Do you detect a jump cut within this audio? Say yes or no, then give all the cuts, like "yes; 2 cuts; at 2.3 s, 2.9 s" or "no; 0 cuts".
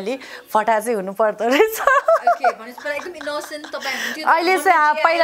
no; 0 cuts